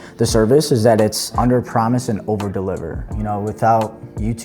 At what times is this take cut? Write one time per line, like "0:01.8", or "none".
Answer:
0:01.3
0:03.1